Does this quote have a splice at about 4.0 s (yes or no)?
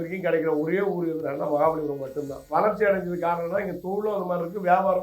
no